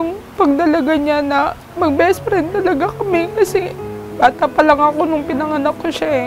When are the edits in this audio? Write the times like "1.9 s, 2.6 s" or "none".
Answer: 1.6 s